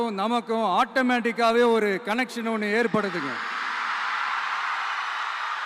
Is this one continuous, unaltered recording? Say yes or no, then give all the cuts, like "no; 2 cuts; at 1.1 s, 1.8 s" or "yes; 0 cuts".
yes; 0 cuts